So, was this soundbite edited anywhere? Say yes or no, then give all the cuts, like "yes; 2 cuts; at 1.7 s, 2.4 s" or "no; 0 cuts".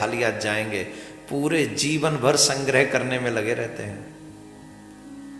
no; 0 cuts